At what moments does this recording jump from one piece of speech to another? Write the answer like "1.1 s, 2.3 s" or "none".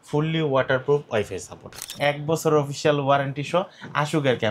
1.9 s

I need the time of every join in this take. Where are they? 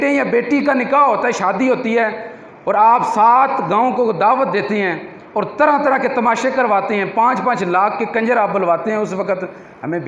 none

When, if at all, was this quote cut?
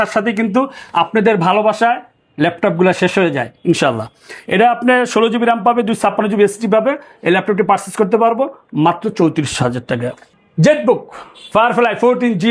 none

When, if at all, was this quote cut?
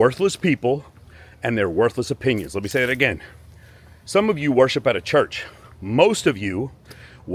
none

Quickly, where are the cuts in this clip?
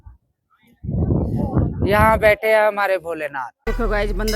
3.5 s

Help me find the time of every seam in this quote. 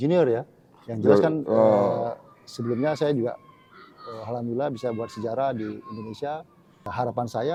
none

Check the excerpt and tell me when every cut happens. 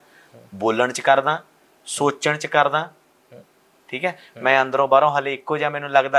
none

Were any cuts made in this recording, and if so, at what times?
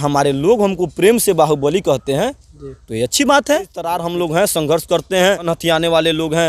4.0 s, 5.4 s

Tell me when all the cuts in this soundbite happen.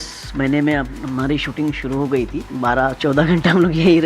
2.4 s

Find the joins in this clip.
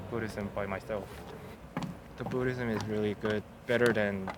1.5 s

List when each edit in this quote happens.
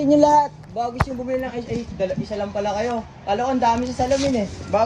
none

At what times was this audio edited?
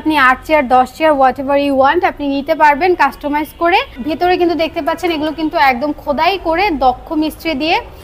4.0 s

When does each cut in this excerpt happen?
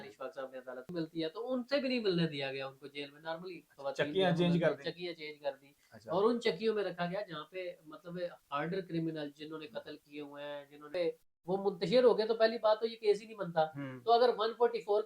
0.9 s, 10.9 s

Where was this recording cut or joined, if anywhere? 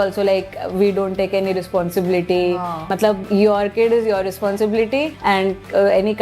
2.9 s, 5.1 s

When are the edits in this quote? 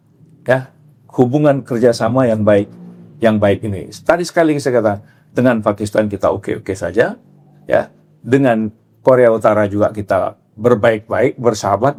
none

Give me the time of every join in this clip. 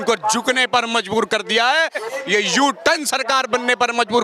2.1 s

